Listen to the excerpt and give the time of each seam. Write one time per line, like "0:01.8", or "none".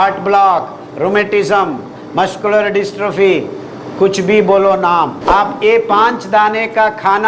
0:05.2